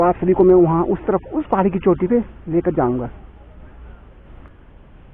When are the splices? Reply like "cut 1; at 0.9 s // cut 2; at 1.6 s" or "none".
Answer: cut 1; at 4.2 s